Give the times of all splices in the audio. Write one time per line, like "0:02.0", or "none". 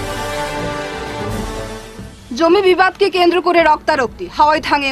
0:01.2